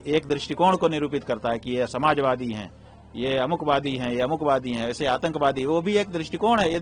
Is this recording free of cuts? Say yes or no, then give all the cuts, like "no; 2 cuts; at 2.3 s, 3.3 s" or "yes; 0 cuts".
yes; 0 cuts